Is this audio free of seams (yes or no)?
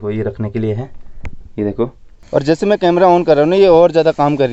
no